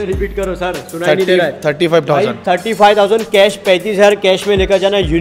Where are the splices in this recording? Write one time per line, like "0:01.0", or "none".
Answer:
none